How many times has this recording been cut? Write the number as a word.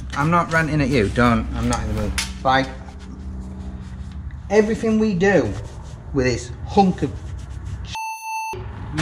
zero